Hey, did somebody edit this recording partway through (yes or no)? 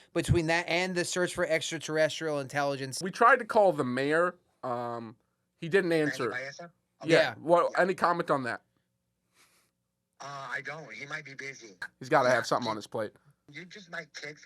yes